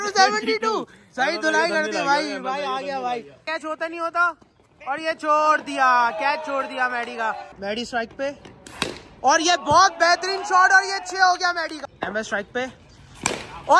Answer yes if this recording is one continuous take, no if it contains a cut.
no